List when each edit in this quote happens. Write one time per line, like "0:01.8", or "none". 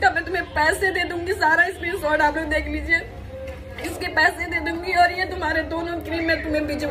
none